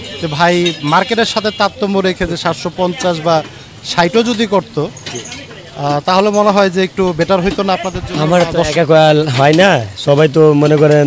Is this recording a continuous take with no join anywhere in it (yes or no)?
yes